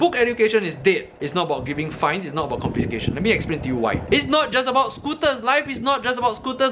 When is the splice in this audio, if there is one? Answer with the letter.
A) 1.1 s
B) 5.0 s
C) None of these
A